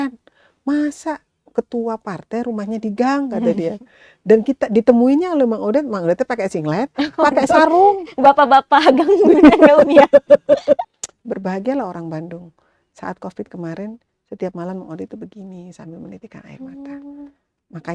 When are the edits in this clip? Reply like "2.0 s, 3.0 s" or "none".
11.0 s